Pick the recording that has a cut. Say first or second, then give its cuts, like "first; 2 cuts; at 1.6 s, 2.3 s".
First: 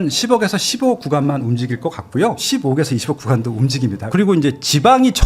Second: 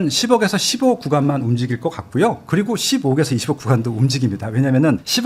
first; 2 cuts; at 2.4 s, 4.1 s